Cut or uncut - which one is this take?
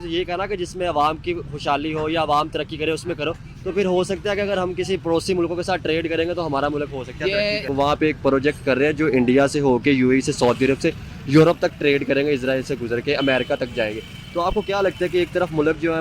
cut